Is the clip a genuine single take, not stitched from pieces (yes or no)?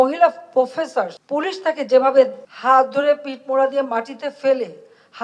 no